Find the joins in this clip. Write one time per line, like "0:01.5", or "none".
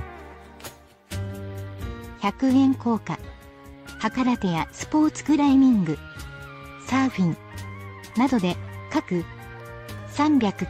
none

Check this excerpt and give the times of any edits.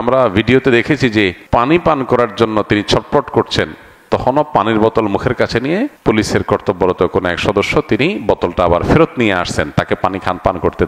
0:01.4
0:06.0

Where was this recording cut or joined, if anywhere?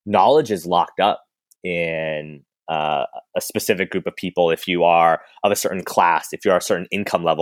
none

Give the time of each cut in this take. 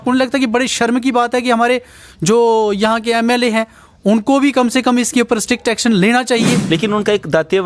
0:06.7

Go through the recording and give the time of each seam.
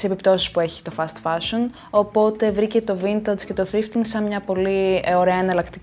0:01.8

